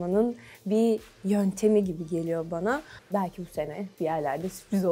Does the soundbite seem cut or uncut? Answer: cut